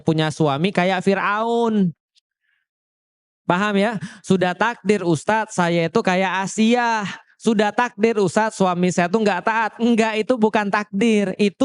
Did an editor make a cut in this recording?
no; 0 cuts

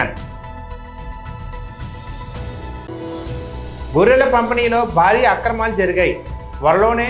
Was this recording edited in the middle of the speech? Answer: no; 0 cuts

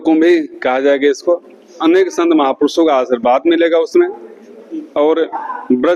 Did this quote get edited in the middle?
yes; 1 cut; at 1.7 s

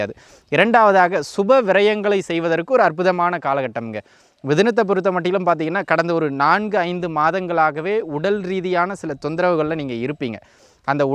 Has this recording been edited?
no; 0 cuts

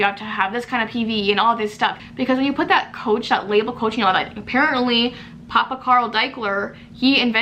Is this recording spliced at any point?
yes; 1 cut; at 2.1 s

